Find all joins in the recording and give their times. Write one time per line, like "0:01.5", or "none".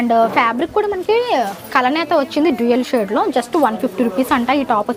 none